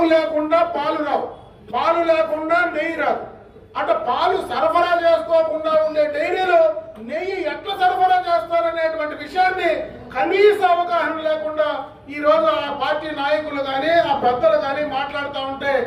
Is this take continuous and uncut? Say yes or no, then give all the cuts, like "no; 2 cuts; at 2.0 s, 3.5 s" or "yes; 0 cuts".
yes; 0 cuts